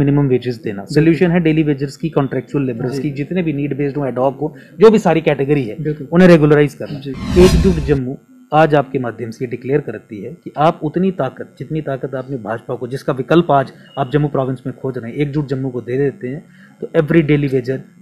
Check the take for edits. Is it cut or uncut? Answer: uncut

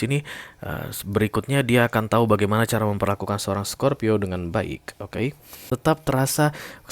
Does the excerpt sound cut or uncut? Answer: cut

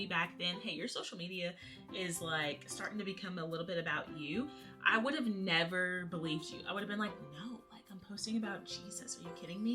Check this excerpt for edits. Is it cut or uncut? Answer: uncut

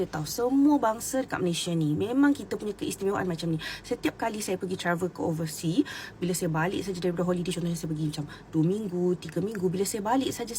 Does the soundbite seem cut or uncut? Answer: uncut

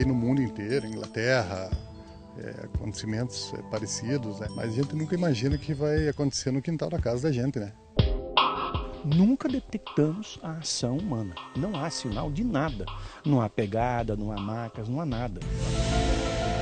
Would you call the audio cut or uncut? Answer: cut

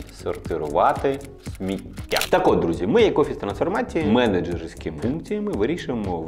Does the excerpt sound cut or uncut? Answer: cut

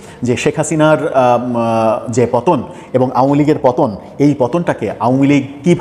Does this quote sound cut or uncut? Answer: uncut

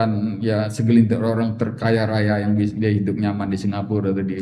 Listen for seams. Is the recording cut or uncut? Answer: uncut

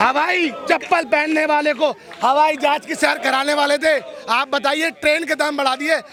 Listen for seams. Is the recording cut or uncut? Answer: uncut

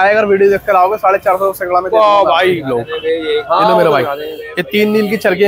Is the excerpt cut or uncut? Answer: uncut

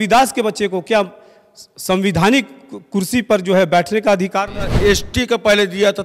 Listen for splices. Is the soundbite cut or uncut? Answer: cut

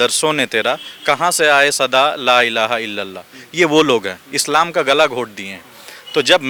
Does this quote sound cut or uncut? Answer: uncut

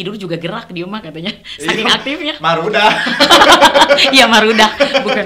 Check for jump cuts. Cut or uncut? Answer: uncut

